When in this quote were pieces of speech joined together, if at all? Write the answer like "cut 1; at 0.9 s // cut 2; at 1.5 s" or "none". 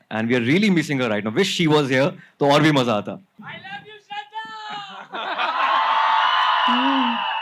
cut 1; at 3.4 s

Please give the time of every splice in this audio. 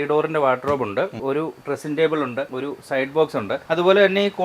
cut 1; at 1.2 s // cut 2; at 2.5 s // cut 3; at 3.6 s

